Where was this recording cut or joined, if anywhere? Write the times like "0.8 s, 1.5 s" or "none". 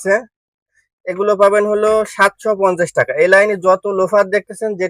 none